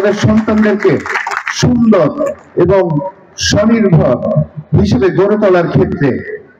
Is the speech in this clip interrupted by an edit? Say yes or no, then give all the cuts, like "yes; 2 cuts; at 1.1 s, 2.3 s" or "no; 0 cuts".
no; 0 cuts